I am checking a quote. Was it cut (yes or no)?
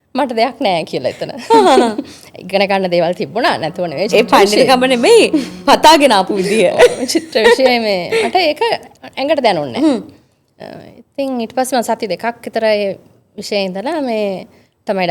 no